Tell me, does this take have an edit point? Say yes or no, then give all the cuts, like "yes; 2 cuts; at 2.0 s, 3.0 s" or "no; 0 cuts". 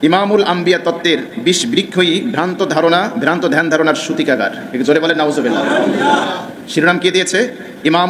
no; 0 cuts